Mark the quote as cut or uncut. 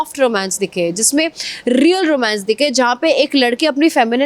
uncut